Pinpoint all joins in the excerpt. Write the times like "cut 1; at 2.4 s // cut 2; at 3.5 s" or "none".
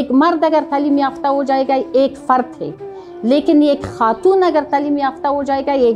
none